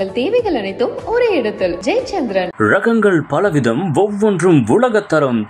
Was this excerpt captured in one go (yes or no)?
yes